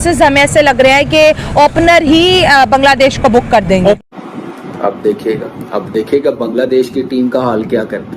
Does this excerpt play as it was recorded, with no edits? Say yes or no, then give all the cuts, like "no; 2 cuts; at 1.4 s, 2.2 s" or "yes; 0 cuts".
no; 1 cut; at 4.4 s